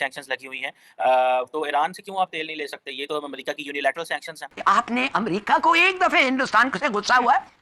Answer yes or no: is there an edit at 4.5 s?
yes